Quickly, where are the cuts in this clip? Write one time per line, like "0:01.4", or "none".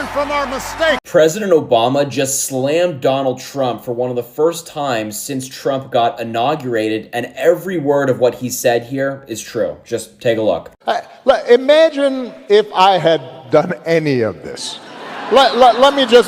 none